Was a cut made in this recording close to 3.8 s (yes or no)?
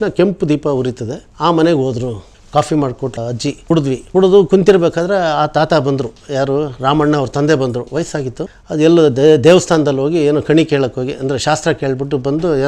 yes